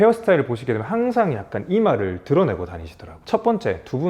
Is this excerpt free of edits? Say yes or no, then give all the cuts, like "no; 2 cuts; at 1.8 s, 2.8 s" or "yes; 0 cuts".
no; 1 cut; at 3.2 s